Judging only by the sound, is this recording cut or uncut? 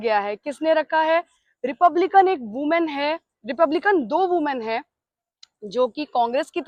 uncut